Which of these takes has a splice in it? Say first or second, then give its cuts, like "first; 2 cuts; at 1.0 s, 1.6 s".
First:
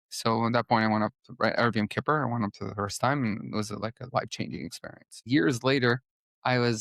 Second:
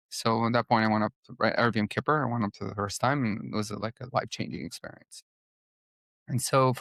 first; 1 cut; at 5.2 s